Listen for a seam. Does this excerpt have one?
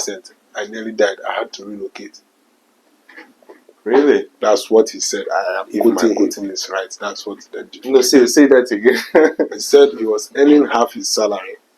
no; 0 cuts

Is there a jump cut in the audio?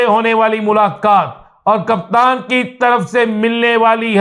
no; 0 cuts

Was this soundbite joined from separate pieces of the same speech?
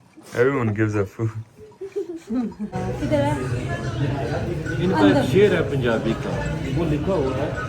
yes; 1 cut; at 2.8 s

